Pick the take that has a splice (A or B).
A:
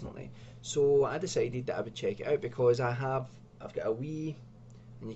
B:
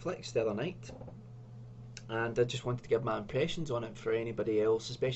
A